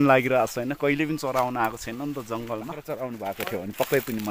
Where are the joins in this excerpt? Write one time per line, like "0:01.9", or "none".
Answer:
0:02.8